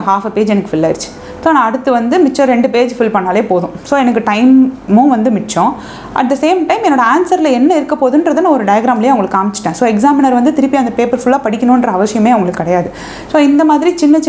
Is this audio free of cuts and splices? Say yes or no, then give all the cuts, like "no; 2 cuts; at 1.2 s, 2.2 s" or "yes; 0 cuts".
yes; 0 cuts